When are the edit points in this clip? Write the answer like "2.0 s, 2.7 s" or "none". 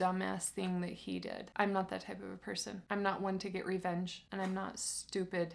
1.4 s, 4.2 s